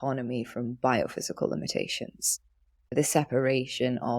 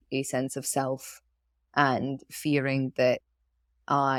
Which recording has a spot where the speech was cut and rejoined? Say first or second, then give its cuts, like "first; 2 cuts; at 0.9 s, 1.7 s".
first; 1 cut; at 2.9 s